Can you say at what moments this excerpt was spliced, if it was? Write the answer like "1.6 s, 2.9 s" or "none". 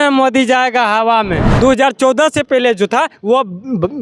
1.4 s